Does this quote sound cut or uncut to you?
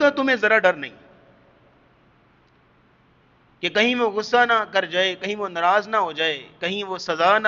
uncut